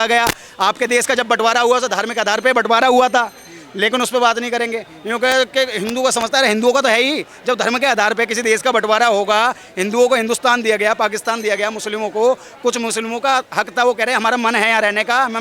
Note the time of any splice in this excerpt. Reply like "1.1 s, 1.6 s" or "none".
none